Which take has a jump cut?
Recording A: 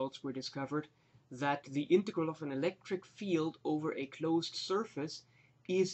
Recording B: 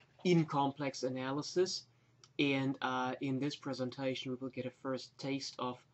A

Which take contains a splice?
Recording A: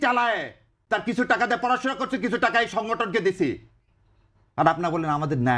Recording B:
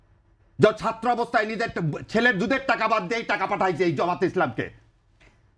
B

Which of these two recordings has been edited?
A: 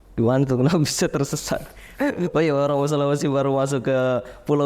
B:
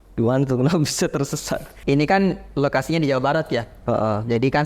B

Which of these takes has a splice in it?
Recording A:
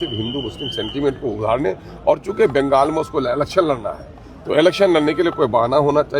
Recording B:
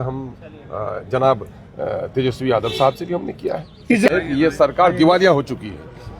B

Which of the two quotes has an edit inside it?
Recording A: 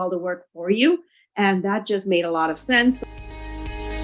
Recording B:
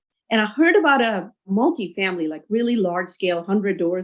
A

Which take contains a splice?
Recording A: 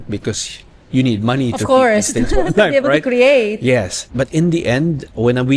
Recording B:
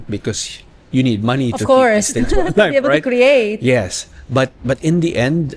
A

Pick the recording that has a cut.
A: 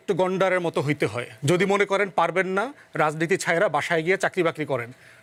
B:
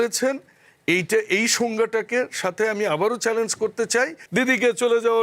B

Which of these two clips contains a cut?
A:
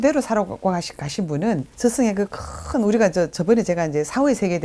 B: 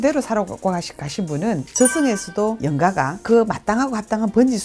B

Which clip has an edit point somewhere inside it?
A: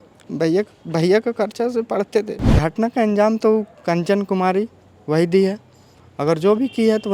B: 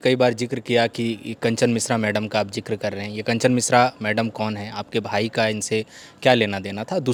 A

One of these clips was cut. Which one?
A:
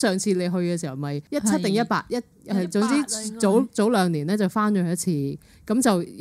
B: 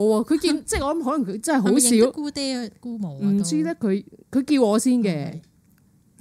A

